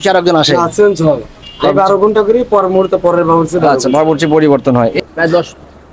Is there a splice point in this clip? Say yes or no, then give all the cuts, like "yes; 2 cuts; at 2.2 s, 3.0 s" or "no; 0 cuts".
yes; 1 cut; at 4.9 s